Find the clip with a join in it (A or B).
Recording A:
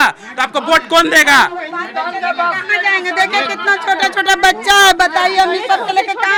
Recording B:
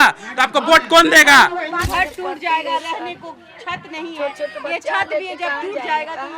B